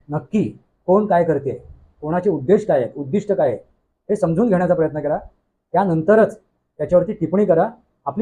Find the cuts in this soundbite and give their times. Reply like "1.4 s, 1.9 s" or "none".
none